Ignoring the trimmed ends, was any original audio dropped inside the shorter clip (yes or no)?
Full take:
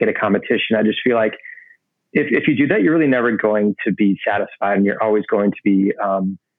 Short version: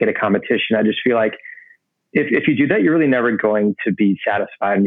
no